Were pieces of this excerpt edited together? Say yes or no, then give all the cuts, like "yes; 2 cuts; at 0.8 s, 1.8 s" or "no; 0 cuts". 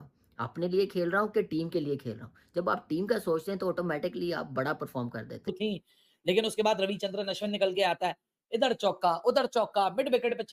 no; 0 cuts